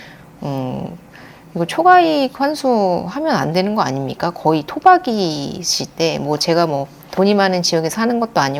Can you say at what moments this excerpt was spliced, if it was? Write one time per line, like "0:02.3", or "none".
none